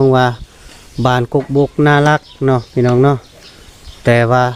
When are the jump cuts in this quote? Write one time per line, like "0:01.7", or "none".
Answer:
none